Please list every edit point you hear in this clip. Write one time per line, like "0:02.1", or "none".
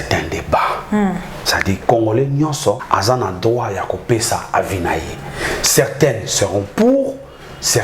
0:02.8